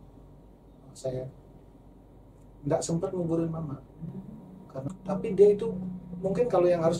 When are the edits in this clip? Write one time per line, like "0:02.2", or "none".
0:04.9